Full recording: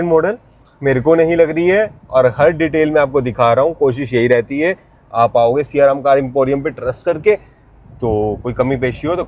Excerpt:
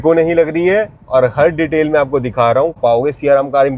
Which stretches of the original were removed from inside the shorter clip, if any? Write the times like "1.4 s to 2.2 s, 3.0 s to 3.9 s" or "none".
3.8 s to 5.3 s